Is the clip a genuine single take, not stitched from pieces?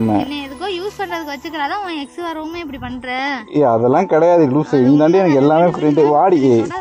yes; 0 cuts

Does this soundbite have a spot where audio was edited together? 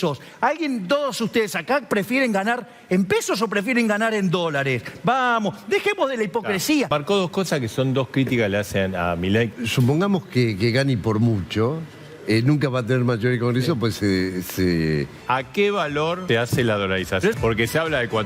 yes; 5 cuts; at 6.9 s, 9.5 s, 15.1 s, 16.2 s, 17.4 s

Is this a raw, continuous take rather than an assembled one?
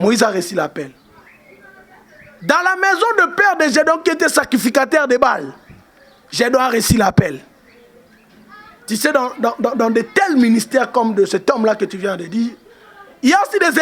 yes; 0 cuts

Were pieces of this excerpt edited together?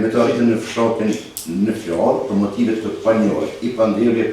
no; 0 cuts

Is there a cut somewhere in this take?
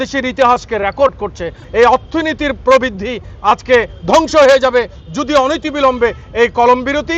yes; 1 cut; at 1.6 s

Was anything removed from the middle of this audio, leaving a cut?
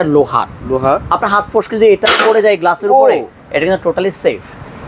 no; 0 cuts

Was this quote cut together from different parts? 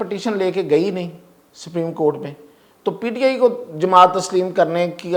no; 0 cuts

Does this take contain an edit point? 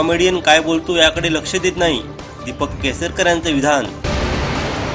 yes; 1 cut; at 3.9 s

